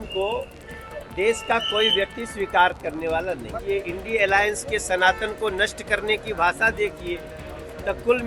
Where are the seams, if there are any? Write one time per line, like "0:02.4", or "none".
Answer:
0:03.5